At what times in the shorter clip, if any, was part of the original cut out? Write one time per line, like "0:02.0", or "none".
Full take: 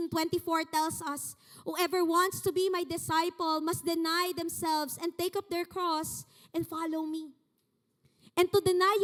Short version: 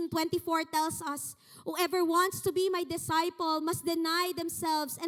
none